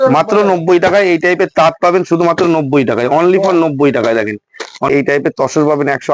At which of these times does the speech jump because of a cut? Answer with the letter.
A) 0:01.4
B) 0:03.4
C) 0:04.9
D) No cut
C